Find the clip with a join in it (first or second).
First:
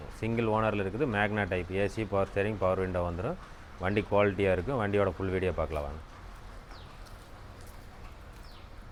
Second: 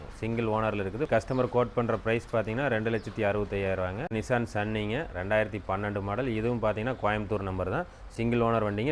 second